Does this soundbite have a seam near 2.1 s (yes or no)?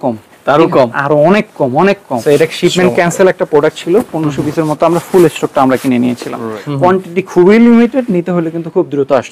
yes